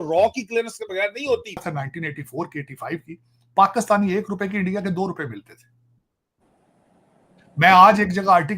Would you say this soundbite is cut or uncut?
uncut